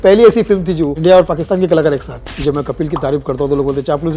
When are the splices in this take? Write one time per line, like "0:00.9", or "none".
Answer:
0:00.9
0:02.2